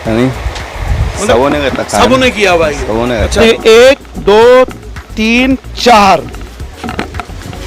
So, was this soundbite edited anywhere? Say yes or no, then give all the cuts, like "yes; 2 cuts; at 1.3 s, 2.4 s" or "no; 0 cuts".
yes; 1 cut; at 3.3 s